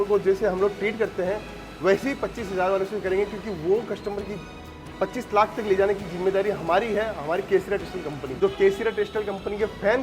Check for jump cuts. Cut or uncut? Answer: cut